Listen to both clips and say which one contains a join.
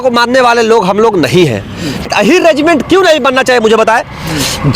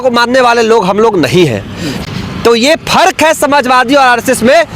first; 1 cut; at 2.1 s

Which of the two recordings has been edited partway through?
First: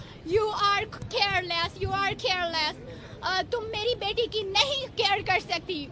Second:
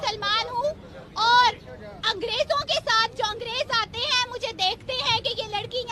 first; 1 cut; at 2.6 s

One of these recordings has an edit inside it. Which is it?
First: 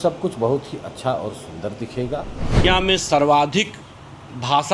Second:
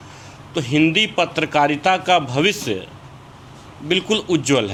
first; 1 cut; at 2.6 s

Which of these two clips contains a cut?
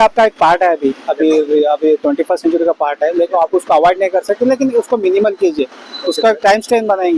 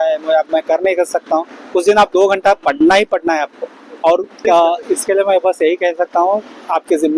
second; 1 cut; at 4.4 s

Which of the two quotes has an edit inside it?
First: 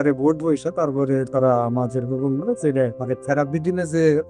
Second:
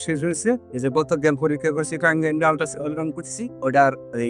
first; 1 cut; at 3.0 s

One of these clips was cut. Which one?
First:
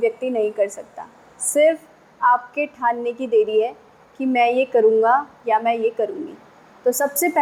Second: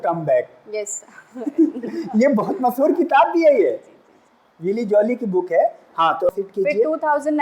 second; 1 cut; at 6.3 s

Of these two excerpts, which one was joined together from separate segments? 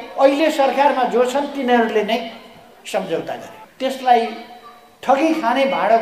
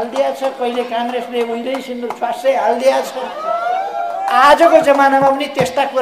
first; 1 cut; at 3.6 s

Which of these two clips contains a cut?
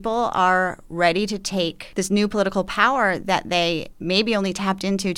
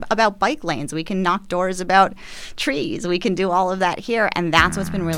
first; 1 cut; at 1.8 s

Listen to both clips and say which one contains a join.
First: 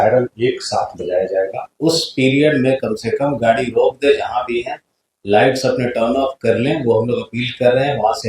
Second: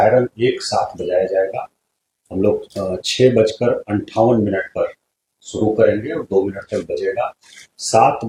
first; 1 cut; at 1.7 s

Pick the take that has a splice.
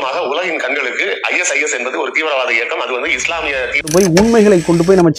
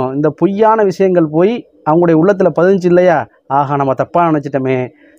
first; 1 cut; at 3.9 s

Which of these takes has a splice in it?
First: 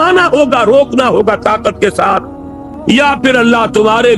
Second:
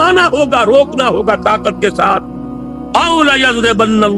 first; 1 cut; at 2.7 s

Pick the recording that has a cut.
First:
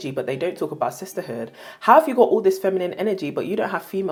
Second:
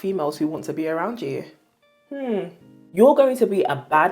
second; 1 cut; at 2.8 s

